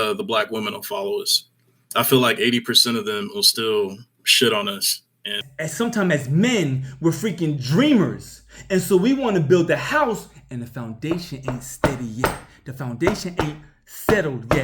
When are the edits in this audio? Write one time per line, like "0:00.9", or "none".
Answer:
0:05.4